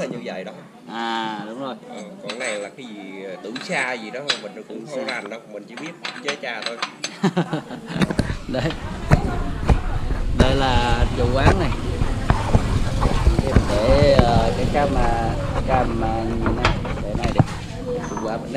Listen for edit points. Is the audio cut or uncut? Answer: uncut